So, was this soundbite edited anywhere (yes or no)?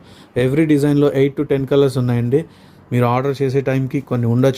no